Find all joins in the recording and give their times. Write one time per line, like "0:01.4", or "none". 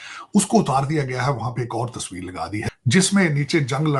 0:02.7